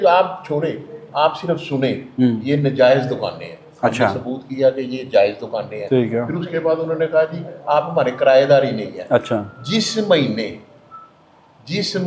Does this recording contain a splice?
no; 0 cuts

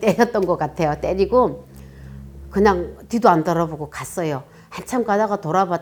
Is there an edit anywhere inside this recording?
no; 0 cuts

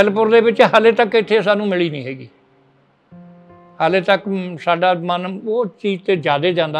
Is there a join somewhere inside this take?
no; 0 cuts

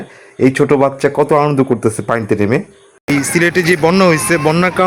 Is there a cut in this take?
yes; 1 cut; at 3.1 s

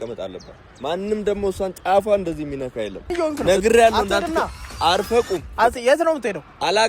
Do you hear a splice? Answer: yes; 1 cut; at 3.3 s

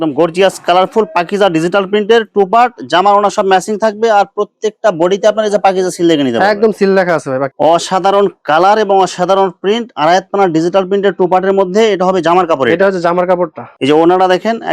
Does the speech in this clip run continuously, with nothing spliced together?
no; 2 cuts; at 7.5 s, 13.7 s

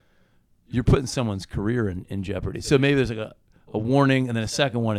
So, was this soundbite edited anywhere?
no; 0 cuts

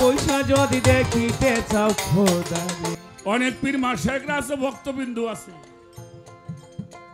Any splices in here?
yes; 1 cut; at 3.0 s

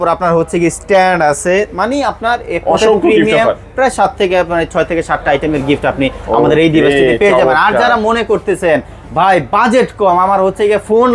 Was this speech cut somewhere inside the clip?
no; 0 cuts

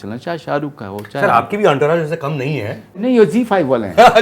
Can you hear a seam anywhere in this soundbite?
yes; 1 cut; at 3.0 s

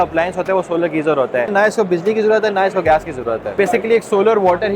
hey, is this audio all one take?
no; 2 cuts; at 1.5 s, 3.6 s

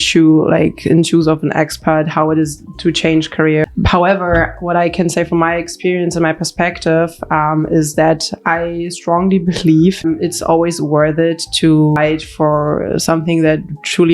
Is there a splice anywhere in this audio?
yes; 3 cuts; at 3.6 s, 10.0 s, 12.0 s

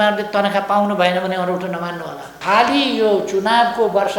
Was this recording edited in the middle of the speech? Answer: yes; 1 cut; at 2.3 s

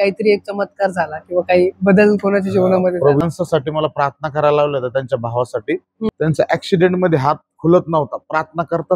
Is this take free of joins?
no; 2 cuts; at 3.2 s, 6.1 s

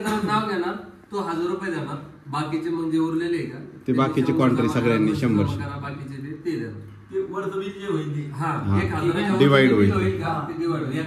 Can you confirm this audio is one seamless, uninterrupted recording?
yes; 0 cuts

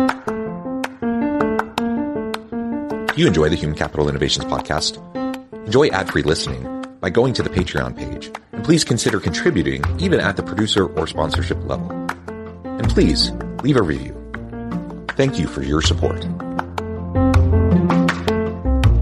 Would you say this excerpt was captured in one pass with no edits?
no; 1 cut; at 3.1 s

